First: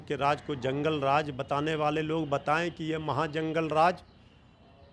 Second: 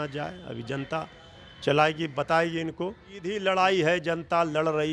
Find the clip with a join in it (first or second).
second